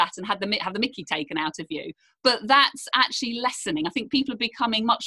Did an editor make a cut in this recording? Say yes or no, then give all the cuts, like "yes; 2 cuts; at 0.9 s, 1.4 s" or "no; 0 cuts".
no; 0 cuts